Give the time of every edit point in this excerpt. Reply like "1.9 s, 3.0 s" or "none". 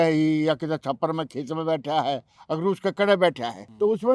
none